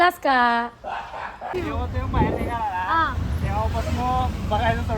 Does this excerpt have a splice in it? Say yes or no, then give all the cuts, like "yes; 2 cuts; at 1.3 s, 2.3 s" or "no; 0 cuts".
yes; 1 cut; at 1.6 s